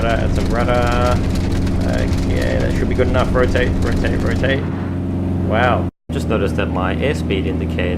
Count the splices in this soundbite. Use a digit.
2